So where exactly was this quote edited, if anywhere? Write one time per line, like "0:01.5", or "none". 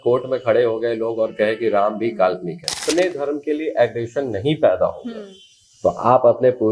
0:02.8